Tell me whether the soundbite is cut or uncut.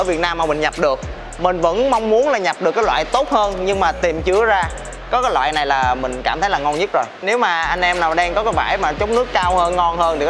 uncut